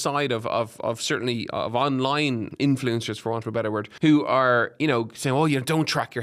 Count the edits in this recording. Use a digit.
2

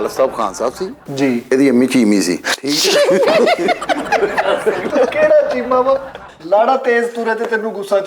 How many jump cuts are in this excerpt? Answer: 1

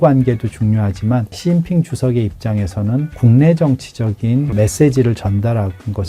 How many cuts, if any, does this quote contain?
3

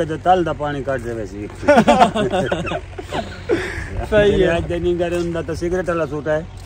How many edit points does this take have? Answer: 1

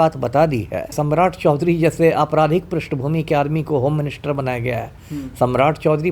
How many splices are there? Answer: 1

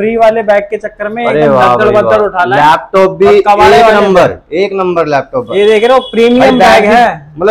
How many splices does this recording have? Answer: 0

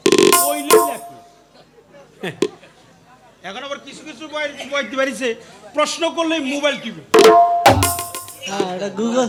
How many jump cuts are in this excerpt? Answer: 0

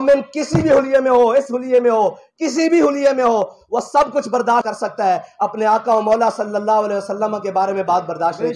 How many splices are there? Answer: 0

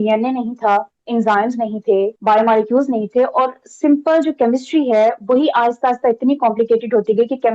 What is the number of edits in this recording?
2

